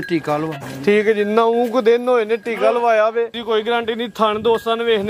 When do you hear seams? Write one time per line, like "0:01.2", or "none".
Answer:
0:03.4